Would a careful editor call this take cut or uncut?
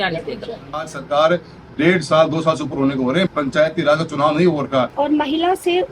cut